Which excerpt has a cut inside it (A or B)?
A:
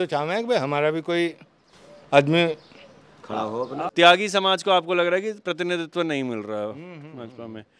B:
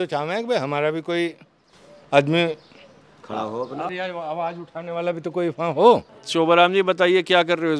B